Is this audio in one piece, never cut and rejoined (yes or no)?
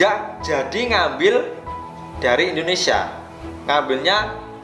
yes